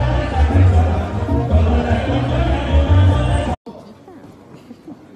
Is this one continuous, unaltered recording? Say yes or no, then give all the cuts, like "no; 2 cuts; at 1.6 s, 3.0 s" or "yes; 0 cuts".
no; 1 cut; at 1.2 s